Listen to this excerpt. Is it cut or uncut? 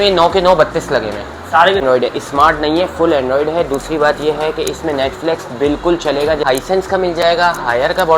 cut